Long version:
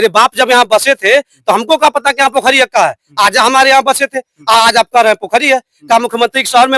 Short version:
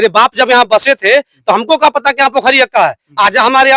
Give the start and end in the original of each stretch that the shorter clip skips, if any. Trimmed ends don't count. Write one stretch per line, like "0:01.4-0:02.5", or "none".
none